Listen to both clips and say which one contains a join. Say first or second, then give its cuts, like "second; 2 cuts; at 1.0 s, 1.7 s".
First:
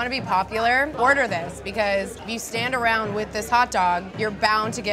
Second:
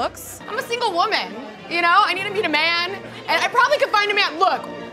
first; 3 cuts; at 0.9 s, 2.2 s, 4.1 s